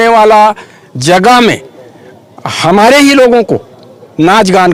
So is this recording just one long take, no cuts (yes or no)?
yes